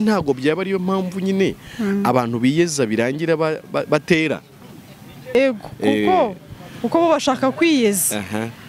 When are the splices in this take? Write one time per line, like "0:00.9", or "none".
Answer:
0:05.3